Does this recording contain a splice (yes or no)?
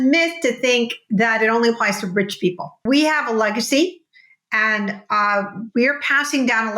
yes